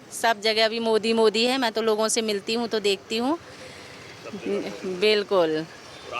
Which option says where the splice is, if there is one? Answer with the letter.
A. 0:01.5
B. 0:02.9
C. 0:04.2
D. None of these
D